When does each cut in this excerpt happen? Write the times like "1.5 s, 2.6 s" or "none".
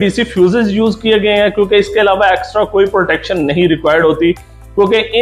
none